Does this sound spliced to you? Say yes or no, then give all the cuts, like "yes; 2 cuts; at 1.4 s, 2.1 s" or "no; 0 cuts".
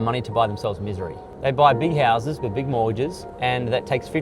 yes; 1 cut; at 1.2 s